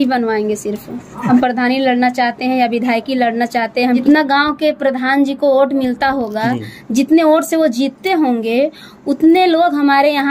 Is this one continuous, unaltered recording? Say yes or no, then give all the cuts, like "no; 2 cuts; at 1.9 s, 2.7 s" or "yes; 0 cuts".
no; 2 cuts; at 1.3 s, 4.0 s